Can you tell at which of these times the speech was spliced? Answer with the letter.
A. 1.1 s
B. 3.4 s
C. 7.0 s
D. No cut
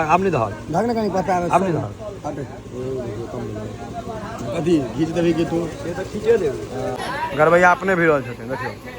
C